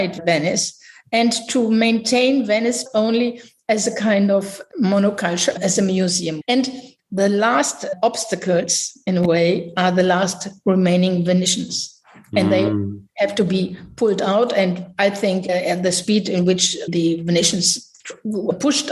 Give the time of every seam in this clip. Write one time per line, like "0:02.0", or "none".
0:02.8
0:06.3

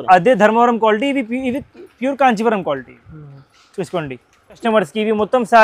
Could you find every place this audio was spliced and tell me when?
0:04.6

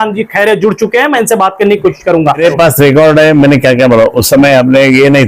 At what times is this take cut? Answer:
0:02.4

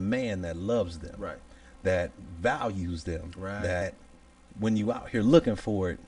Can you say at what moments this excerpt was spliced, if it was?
0:03.8

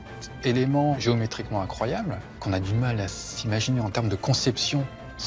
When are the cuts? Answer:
0:01.0
0:02.4

